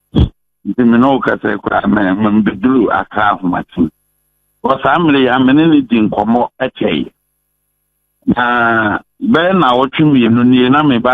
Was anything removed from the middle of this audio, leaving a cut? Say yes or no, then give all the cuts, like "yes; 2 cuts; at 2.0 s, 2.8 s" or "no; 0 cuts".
yes; 1 cut; at 3.7 s